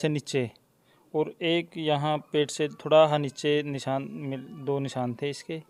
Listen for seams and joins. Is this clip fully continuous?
yes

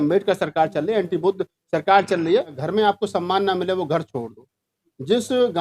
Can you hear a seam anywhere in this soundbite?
yes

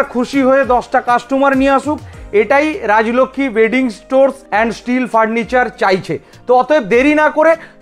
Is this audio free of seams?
yes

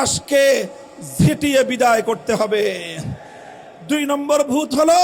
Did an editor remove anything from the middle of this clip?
no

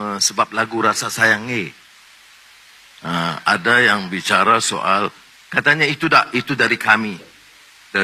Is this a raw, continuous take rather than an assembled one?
yes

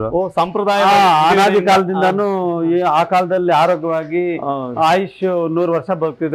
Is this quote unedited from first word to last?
yes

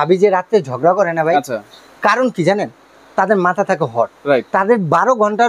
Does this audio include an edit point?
no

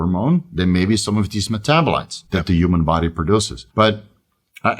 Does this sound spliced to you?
yes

